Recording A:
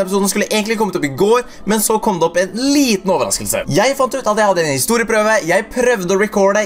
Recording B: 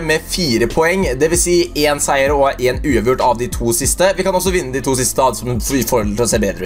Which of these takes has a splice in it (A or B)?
B